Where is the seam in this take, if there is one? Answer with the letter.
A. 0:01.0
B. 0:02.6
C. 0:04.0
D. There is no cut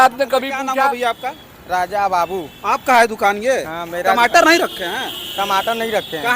A